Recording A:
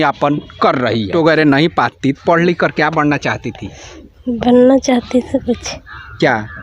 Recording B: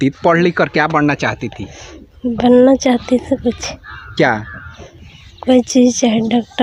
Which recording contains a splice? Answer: A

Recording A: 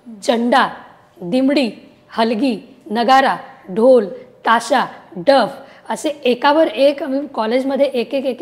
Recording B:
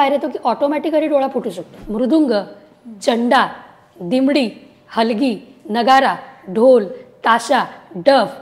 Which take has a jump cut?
B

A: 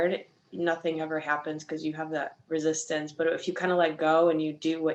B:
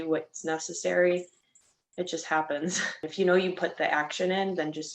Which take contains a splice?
B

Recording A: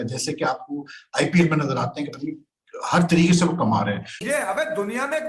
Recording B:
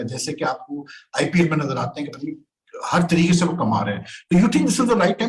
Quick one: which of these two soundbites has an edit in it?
A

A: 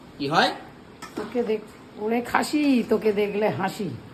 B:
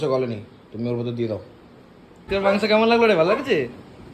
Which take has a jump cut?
B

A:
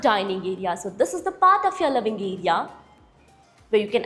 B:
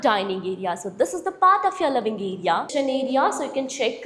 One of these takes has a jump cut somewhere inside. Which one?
B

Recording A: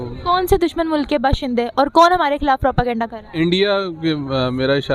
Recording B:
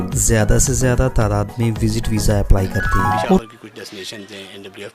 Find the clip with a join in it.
B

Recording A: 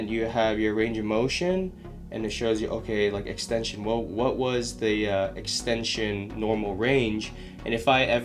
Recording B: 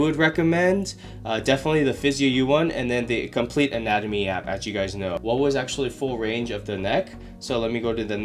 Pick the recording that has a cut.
B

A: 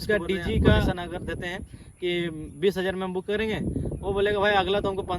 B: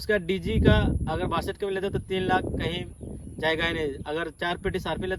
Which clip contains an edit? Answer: A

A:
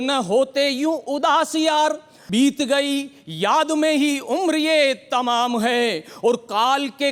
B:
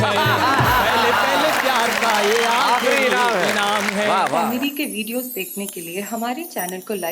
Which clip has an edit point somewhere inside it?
B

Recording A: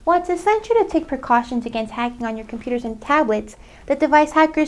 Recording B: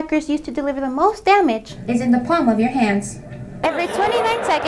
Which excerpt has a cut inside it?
B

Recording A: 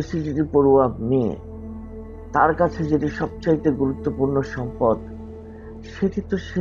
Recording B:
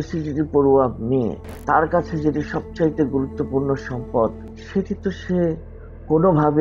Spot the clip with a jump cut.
B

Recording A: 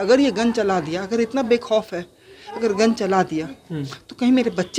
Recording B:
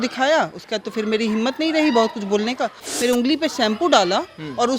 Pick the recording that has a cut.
B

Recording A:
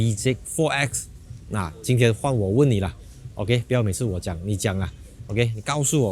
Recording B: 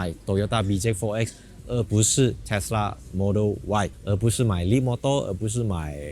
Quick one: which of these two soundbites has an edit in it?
B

